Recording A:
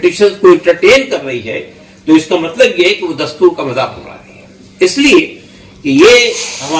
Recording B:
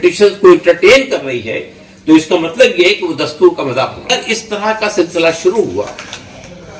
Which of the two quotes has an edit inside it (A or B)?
B